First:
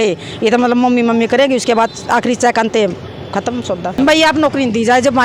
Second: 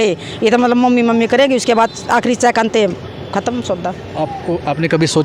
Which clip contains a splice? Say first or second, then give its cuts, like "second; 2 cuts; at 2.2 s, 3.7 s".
first; 1 cut; at 4.0 s